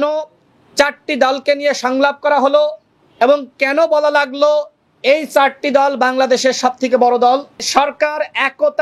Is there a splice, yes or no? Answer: yes